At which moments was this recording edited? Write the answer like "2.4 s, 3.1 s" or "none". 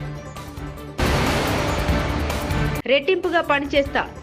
1.0 s, 2.8 s